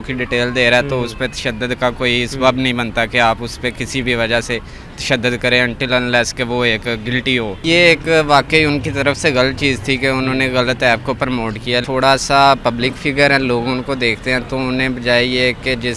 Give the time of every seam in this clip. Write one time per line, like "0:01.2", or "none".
0:07.6
0:11.9